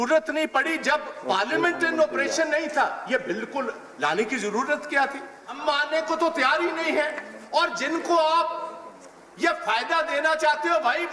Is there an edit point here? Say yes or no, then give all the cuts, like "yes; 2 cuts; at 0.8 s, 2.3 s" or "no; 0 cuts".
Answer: yes; 1 cut; at 5.6 s